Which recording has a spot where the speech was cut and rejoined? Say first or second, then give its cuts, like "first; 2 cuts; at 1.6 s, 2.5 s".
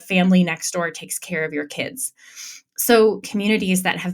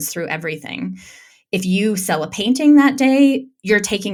first; 1 cut; at 3.2 s